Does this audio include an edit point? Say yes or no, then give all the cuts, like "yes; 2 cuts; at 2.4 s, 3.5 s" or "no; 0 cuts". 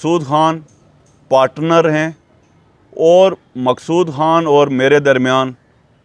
no; 0 cuts